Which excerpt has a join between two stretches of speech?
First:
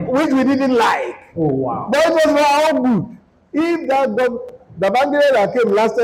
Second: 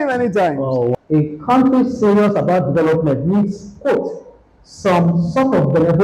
second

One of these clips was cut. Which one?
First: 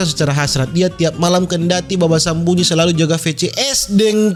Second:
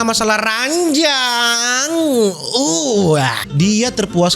second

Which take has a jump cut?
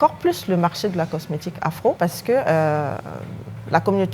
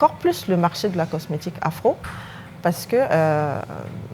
first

